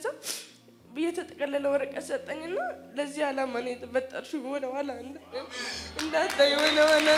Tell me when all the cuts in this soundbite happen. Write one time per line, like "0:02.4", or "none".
none